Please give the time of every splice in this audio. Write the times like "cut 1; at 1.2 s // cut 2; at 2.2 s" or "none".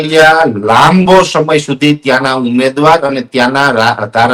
none